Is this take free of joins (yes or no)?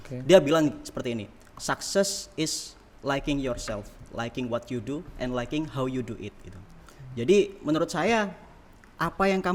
yes